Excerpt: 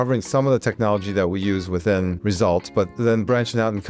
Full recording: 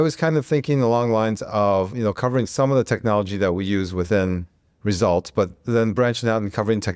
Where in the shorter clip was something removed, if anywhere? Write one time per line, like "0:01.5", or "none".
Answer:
0:02.8